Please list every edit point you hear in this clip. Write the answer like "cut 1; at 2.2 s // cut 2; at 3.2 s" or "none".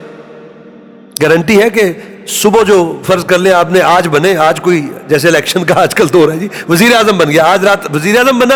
none